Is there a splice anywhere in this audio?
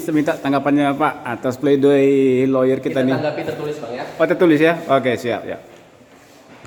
no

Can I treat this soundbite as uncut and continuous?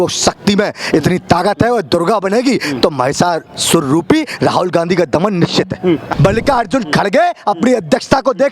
no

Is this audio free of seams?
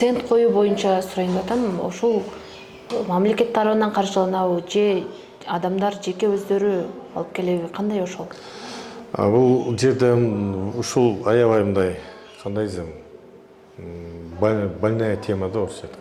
yes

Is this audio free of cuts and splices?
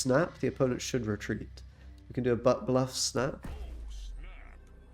yes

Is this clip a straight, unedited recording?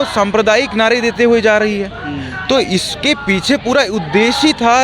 yes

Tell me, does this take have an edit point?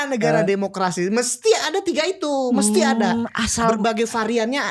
no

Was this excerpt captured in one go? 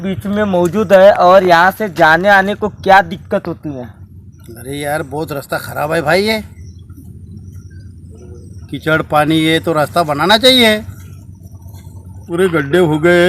no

